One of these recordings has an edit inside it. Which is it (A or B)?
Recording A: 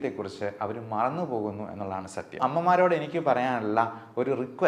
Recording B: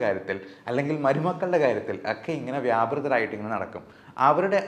A